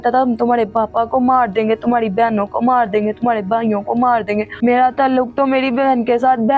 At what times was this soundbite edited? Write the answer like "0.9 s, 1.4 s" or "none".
4.5 s